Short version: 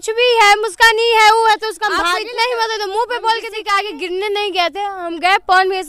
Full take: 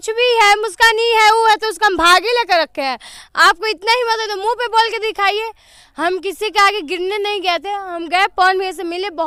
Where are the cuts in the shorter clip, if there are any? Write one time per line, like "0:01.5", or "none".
0:02.0
0:03.6